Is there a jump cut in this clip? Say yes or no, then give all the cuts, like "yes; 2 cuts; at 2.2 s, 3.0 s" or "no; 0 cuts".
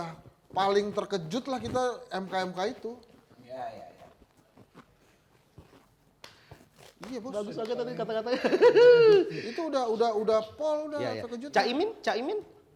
no; 0 cuts